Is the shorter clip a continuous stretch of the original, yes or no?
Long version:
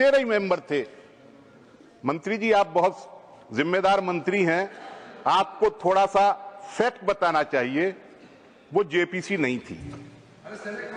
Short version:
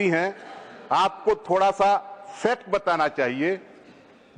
yes